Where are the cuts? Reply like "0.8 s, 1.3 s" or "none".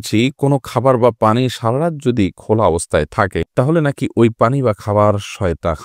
none